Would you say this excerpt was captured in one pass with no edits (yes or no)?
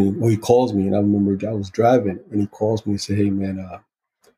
yes